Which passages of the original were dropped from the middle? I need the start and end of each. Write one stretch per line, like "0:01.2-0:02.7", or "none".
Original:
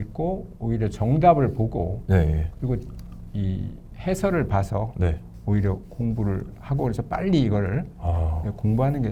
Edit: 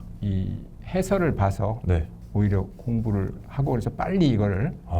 none

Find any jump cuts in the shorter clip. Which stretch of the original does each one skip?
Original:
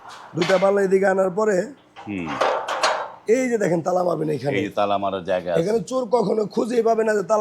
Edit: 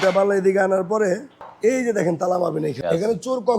0:01.9-0:03.1
0:04.4-0:05.4

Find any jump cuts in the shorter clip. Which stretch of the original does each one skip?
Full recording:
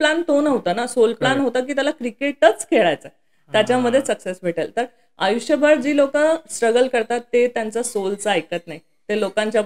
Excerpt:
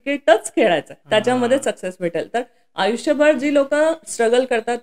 0:03.1-0:03.4

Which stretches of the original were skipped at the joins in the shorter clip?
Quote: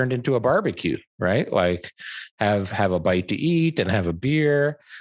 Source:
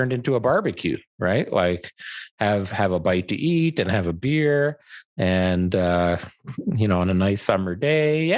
none

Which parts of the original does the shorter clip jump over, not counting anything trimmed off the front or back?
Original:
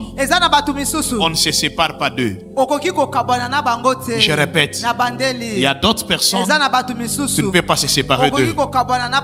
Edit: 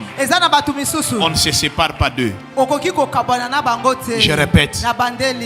none

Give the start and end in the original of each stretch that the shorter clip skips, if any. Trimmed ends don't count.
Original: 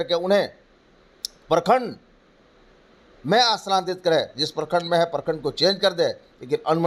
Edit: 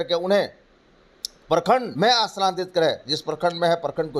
0:01.9-0:03.2

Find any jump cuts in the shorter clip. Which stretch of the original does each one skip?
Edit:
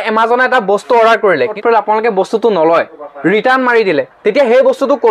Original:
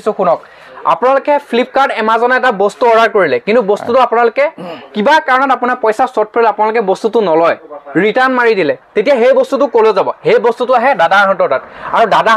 0:03.4-0:06.2

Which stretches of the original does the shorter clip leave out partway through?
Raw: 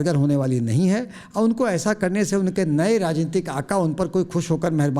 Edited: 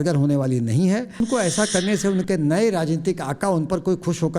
0:01.2-0:01.5

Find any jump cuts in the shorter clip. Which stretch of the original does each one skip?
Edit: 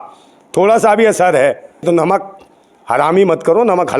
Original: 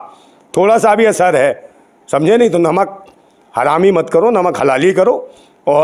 0:01.8-0:02.5

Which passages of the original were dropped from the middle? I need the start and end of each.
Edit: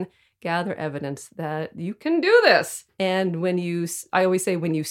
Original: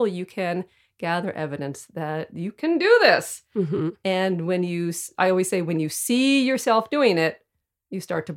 0:03.5-0:03.9

